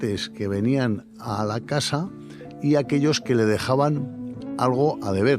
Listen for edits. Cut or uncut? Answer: cut